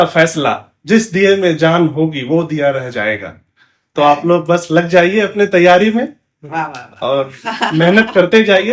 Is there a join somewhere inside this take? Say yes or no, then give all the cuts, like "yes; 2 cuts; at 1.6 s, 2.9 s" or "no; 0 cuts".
no; 0 cuts